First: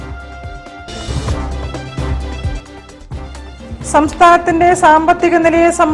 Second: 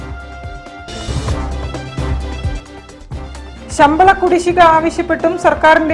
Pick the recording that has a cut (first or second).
second